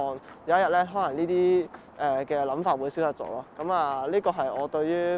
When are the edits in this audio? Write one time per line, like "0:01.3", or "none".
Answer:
none